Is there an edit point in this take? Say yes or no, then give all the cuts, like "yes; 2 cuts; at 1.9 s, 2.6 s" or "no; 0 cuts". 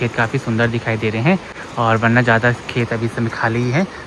no; 0 cuts